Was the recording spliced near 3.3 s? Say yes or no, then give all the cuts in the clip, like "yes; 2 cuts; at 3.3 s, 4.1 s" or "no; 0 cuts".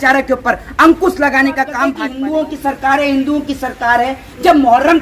no; 1 cut; at 2.0 s